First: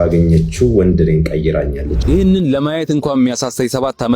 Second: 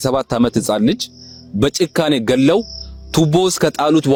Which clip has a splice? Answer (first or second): first